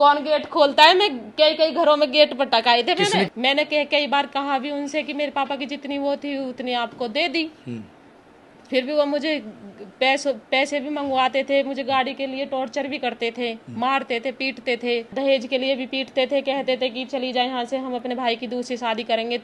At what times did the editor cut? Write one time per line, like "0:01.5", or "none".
0:03.3
0:15.1